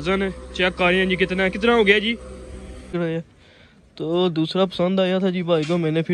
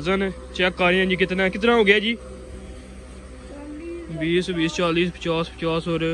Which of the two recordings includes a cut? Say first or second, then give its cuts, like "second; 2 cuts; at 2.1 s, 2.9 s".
first; 1 cut; at 2.8 s